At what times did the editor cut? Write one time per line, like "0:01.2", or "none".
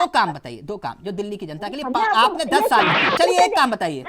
0:03.2